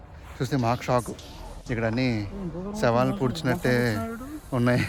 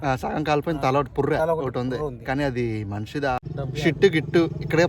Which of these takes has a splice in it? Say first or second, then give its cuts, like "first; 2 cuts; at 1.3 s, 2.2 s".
second; 1 cut; at 3.5 s